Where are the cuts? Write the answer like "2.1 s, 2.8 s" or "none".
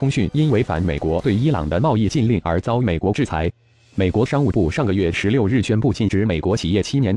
3.7 s